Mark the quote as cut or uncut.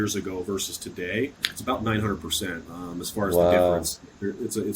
cut